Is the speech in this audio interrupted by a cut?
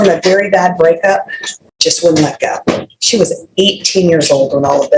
no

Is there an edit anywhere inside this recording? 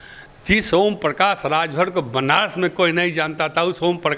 no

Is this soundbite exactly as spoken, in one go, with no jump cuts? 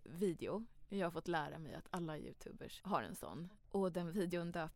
no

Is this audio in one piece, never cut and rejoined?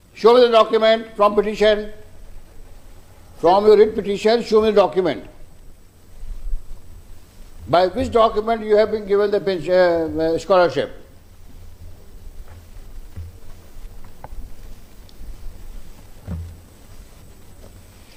yes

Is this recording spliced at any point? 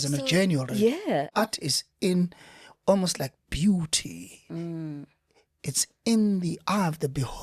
yes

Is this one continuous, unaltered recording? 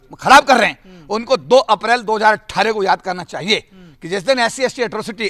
yes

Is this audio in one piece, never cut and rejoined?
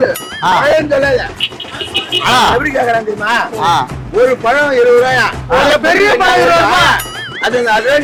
yes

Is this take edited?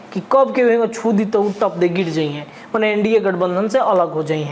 no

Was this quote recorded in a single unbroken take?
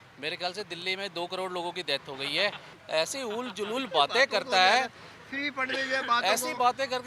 yes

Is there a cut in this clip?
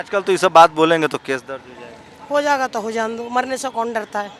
no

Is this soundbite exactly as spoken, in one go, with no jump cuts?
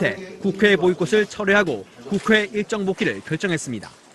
no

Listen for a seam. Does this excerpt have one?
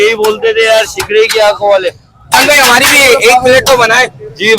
yes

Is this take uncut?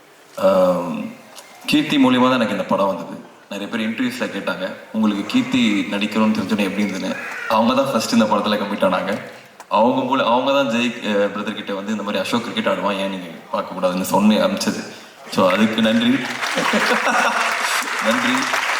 yes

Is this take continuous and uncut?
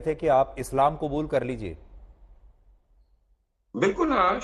yes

